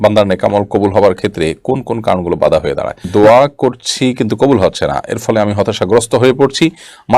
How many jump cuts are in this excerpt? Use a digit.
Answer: 1